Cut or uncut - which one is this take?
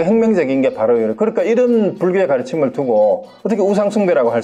uncut